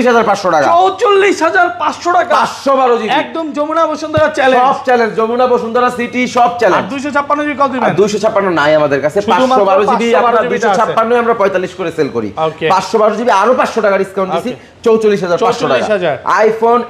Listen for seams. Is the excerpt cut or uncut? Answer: uncut